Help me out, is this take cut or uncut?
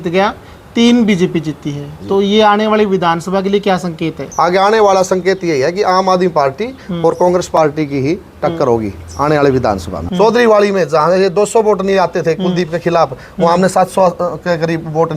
cut